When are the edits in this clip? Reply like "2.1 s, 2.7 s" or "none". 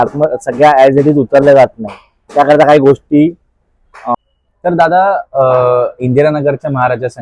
4.1 s